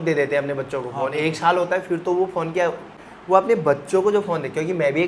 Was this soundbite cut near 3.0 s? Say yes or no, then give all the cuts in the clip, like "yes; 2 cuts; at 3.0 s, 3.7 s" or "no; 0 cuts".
yes; 1 cut; at 3.0 s